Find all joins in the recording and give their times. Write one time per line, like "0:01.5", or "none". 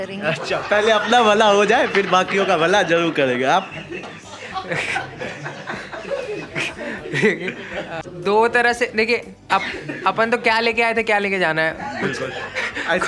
0:08.0